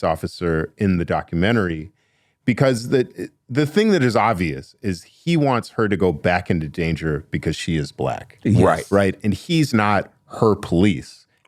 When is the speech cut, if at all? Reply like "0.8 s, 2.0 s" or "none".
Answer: none